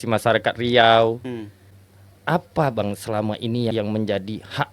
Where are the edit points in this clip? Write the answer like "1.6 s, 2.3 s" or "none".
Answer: 1.3 s